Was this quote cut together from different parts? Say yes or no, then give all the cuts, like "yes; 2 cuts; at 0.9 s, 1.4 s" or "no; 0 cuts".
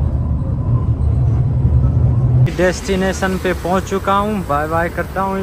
yes; 1 cut; at 2.5 s